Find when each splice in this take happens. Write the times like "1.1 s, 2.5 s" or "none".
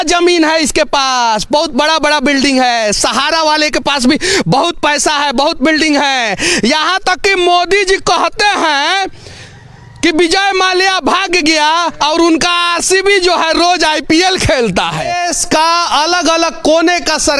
15.1 s